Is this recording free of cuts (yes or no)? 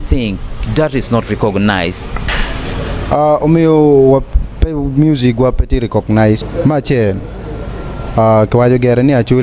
yes